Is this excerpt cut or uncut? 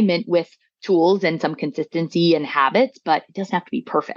uncut